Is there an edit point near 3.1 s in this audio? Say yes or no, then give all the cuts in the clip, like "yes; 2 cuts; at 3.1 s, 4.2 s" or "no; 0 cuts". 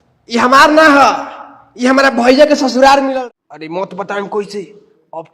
yes; 1 cut; at 3.1 s